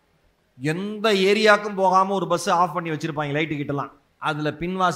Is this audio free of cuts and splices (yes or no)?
no